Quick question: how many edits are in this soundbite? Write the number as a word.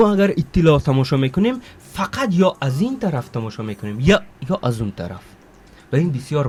zero